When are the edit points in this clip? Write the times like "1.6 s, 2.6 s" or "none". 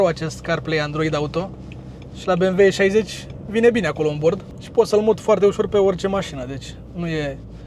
4.5 s